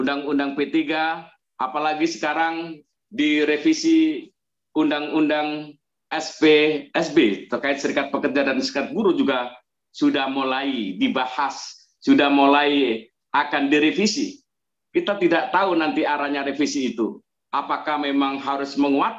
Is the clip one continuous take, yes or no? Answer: yes